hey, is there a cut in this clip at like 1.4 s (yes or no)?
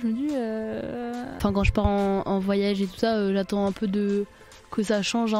yes